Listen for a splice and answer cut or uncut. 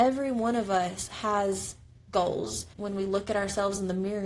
cut